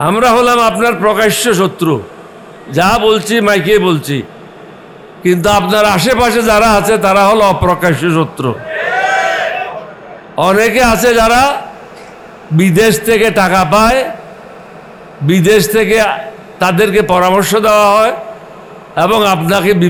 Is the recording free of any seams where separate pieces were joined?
yes; 0 cuts

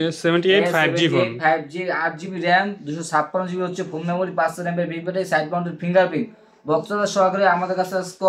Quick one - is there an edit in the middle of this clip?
no; 0 cuts

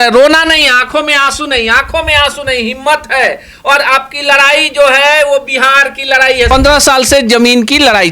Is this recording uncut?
no; 1 cut; at 6.5 s

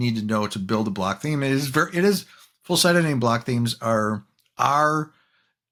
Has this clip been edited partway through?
no; 0 cuts

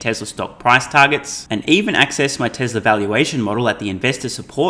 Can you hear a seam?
no; 0 cuts

